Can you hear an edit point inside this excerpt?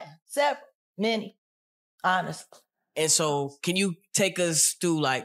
no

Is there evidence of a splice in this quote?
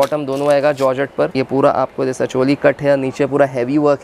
yes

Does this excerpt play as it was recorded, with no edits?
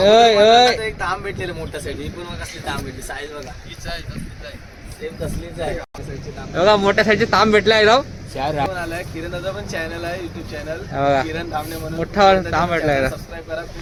yes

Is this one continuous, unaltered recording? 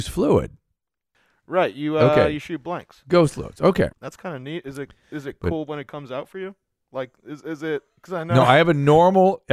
no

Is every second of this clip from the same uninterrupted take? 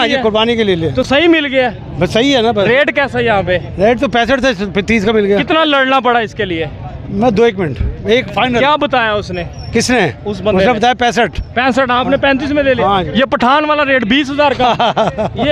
yes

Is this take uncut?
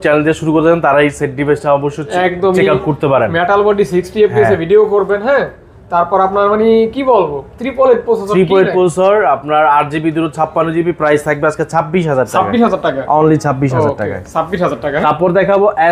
yes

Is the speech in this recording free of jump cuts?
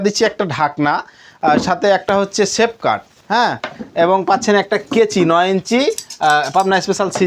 yes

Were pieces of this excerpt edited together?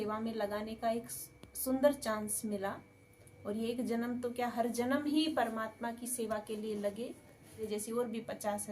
yes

